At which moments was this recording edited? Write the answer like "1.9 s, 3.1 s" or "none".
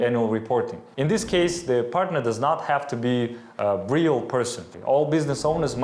0.9 s, 4.7 s